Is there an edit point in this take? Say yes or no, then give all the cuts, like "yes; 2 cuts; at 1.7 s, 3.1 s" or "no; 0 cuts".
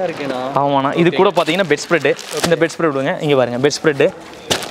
no; 0 cuts